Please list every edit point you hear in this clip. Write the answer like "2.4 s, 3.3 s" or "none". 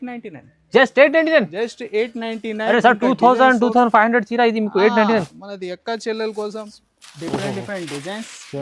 6.7 s